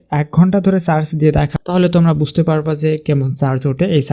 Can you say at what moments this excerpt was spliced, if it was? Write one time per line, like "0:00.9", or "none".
0:01.6

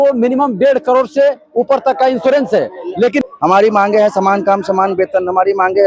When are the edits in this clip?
0:03.2

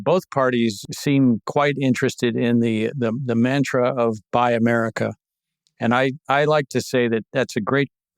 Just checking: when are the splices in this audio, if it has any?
0:00.8
0:01.5

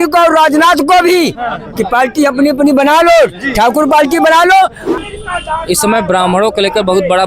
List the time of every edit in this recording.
0:04.9

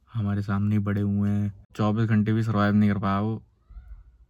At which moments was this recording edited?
0:01.7

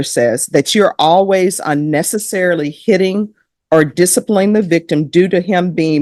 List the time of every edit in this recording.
none

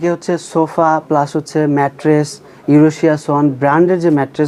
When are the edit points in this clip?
none

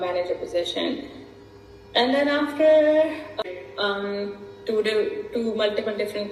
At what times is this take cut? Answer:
0:03.5

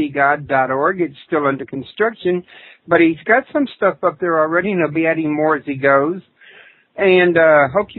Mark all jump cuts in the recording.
0:05.3

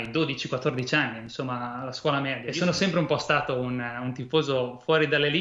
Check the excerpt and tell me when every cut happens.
0:02.4

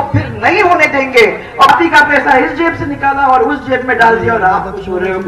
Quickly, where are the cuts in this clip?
0:01.7

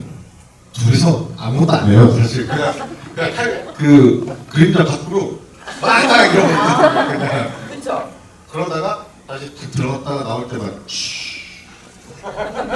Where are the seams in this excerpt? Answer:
none

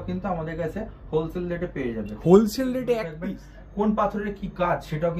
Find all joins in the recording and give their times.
0:03.1

